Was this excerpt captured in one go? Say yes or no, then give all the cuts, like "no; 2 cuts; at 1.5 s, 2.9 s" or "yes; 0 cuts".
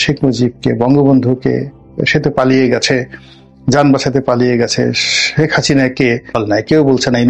no; 1 cut; at 6.3 s